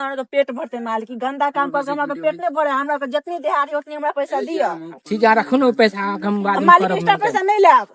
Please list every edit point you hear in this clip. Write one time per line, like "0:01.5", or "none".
none